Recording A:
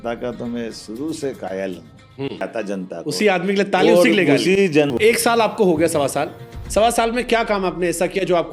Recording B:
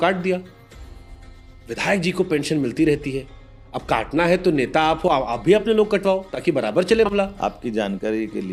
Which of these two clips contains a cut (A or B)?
A